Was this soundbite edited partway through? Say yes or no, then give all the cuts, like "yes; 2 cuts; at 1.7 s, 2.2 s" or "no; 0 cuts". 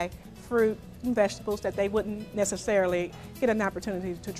yes; 1 cut; at 3.1 s